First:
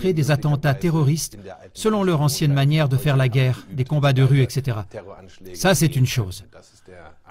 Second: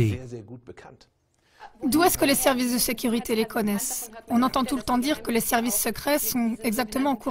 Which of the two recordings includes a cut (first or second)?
first